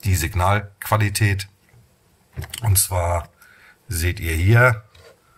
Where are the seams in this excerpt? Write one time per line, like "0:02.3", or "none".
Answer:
none